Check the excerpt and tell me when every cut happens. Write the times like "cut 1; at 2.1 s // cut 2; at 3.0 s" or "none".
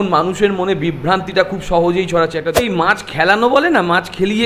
cut 1; at 2.6 s